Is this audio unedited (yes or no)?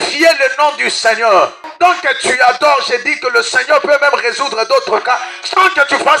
no